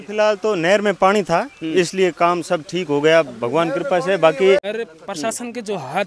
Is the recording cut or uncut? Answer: cut